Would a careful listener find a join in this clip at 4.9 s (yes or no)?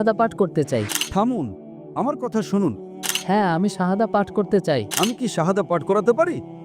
yes